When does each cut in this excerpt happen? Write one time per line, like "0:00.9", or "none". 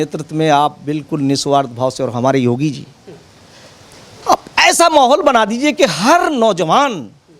none